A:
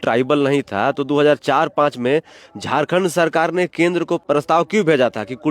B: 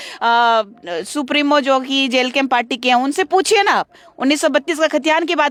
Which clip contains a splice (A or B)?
A